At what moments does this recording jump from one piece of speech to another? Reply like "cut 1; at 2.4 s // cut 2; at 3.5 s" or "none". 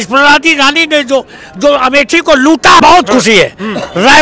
cut 1; at 2.8 s